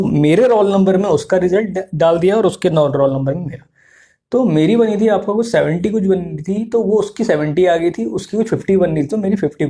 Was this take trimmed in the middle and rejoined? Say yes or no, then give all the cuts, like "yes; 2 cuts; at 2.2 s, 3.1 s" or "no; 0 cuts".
no; 0 cuts